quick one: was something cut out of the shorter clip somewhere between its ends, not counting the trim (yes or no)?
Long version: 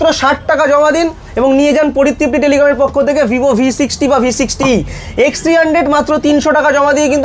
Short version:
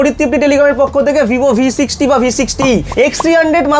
yes